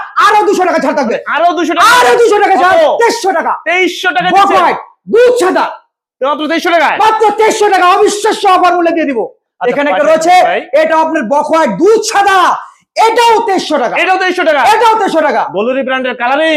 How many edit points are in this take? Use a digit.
0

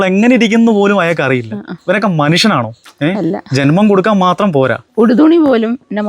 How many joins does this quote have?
1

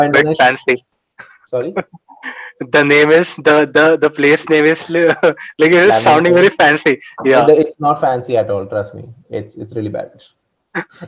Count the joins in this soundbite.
0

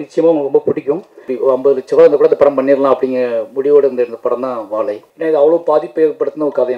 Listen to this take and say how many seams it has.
2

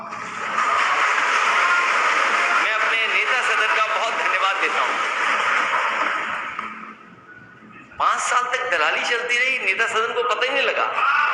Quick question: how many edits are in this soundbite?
0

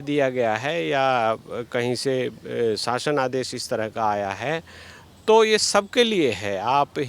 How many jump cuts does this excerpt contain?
0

